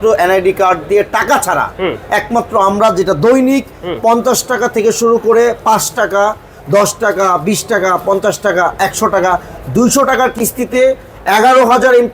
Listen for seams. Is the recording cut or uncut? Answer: uncut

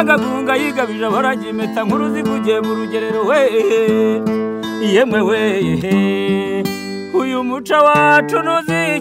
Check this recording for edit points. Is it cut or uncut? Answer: uncut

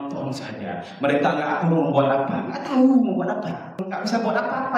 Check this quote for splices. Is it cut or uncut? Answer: cut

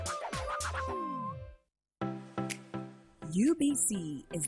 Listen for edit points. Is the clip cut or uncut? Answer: cut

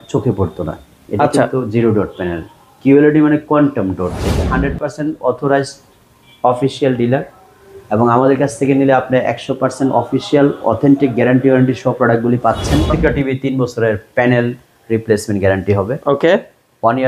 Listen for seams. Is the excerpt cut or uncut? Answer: cut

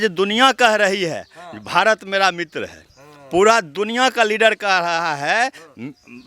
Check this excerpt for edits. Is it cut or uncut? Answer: uncut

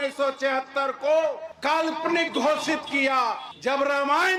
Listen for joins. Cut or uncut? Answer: uncut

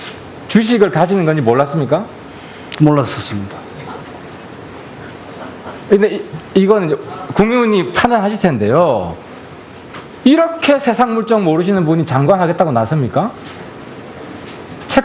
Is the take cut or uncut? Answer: uncut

